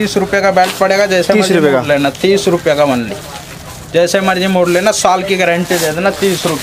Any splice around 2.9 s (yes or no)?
no